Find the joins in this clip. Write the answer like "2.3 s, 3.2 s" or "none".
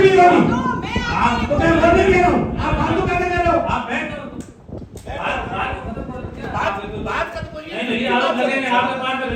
none